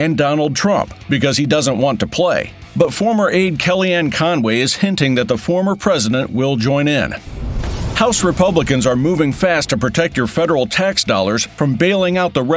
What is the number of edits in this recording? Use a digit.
0